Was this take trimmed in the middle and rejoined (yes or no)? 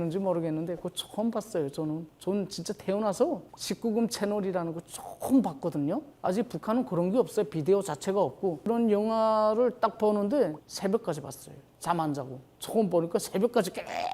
yes